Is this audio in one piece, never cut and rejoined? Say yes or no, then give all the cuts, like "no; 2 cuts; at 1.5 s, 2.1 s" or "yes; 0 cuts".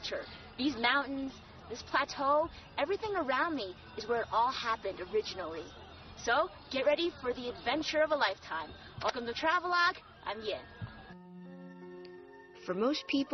yes; 0 cuts